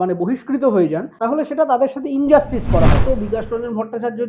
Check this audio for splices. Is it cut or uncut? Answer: cut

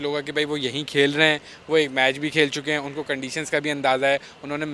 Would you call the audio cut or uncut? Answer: uncut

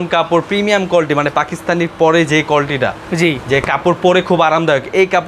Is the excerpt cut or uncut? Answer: uncut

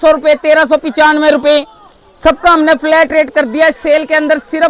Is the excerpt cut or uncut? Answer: uncut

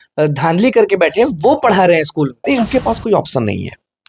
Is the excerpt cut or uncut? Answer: cut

